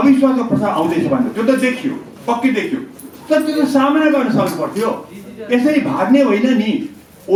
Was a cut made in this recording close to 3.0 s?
no; 0 cuts

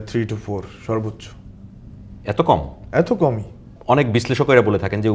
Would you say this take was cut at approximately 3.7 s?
yes; 1 cut; at 3.7 s

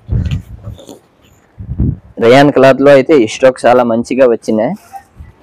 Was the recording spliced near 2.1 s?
yes; 1 cut; at 2.1 s

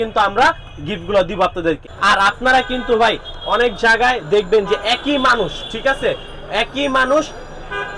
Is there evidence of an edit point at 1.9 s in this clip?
yes; 1 cut; at 1.9 s

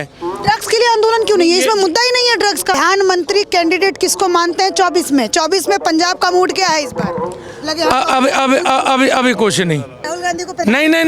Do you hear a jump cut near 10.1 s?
yes; 2 cuts; at 2.8 s, 10.1 s

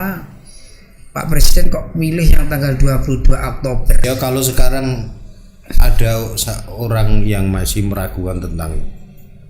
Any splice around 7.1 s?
no; 1 cut; at 4.0 s

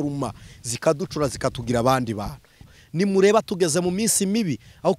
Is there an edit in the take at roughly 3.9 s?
no; 1 cut; at 2.6 s

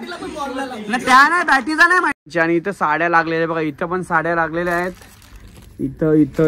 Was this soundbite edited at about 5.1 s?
no; 1 cut; at 2.3 s

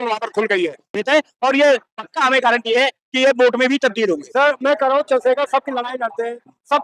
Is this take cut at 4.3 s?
no; 1 cut; at 1.0 s

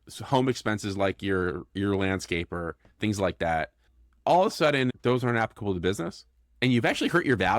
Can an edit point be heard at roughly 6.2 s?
no; 1 cut; at 4.9 s

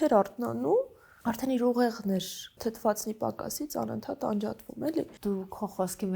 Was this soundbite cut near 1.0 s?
yes; 3 cuts; at 1.0 s, 2.4 s, 5.1 s

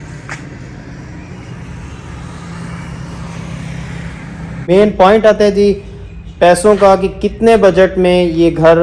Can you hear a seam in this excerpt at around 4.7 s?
yes; 1 cut; at 4.7 s

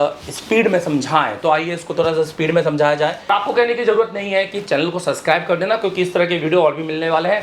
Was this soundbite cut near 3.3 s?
yes; 1 cut; at 3.3 s

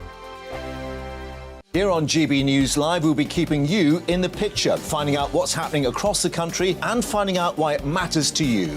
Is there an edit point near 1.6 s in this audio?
yes; 1 cut; at 1.6 s

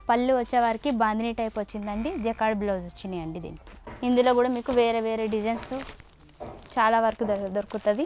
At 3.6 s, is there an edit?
yes; 1 cut; at 3.6 s

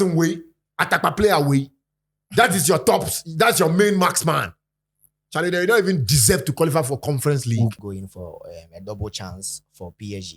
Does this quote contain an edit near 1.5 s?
no; 1 cut; at 7.8 s

